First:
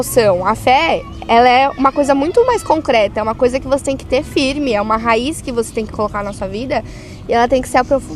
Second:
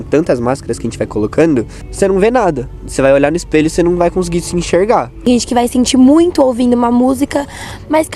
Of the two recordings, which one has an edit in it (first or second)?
second